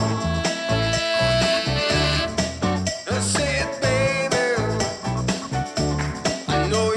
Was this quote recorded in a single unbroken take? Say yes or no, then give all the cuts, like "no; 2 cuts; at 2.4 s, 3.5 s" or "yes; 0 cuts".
yes; 0 cuts